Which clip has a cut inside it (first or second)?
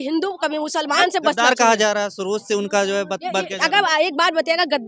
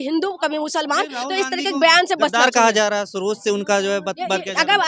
first